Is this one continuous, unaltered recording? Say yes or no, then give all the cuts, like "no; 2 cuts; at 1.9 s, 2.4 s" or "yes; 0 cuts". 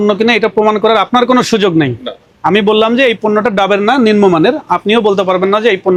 yes; 0 cuts